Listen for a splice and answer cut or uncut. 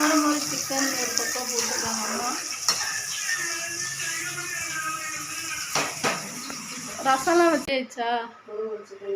cut